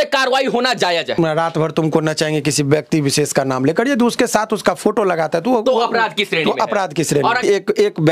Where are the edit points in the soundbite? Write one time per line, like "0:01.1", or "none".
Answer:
0:01.2
0:07.4